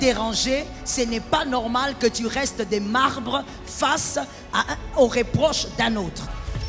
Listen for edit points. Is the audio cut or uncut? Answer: uncut